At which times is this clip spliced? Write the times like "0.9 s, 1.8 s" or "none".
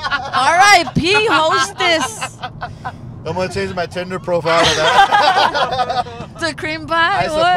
none